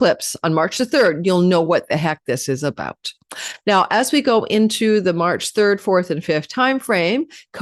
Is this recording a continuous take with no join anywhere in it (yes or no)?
yes